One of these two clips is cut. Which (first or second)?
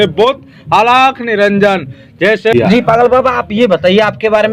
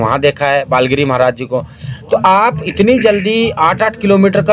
first